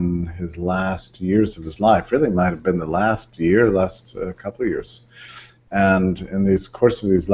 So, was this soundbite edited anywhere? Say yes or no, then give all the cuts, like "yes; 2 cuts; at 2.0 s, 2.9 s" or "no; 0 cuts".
yes; 1 cut; at 4.1 s